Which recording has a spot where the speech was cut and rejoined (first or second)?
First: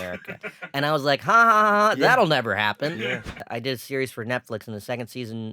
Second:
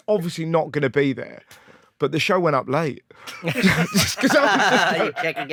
first